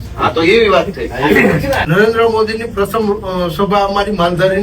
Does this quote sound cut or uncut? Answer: cut